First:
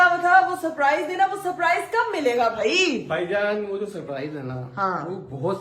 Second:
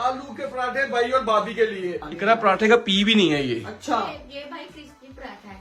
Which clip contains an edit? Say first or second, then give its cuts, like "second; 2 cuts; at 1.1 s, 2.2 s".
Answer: second; 1 cut; at 2.1 s